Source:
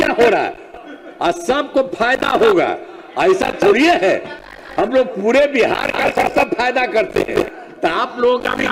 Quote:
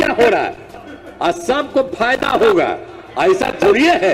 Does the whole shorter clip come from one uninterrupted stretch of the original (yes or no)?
yes